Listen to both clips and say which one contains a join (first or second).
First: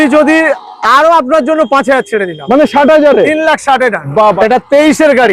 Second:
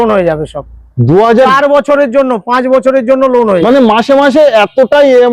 first